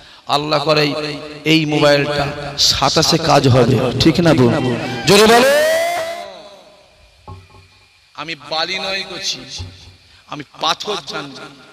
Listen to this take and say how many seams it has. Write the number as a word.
one